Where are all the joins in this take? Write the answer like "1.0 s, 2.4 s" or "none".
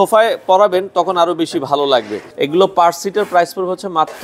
2.2 s